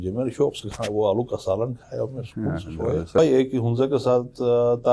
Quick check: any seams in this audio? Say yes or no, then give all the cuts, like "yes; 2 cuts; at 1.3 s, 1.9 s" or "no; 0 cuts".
yes; 1 cut; at 3.2 s